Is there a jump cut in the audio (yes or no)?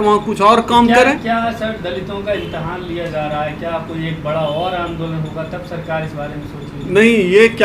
no